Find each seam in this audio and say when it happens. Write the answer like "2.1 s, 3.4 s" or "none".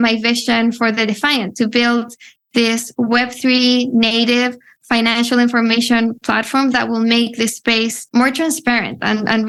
none